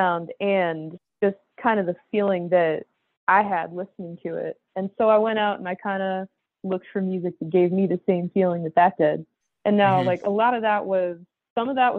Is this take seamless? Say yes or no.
yes